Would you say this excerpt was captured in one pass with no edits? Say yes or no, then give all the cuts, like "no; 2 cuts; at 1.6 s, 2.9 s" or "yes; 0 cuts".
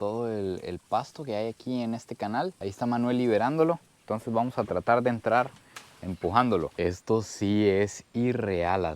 no; 1 cut; at 6.7 s